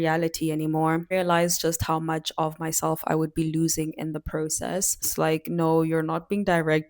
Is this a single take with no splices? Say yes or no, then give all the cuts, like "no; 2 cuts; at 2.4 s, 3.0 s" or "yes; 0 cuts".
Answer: no; 2 cuts; at 1.1 s, 5.1 s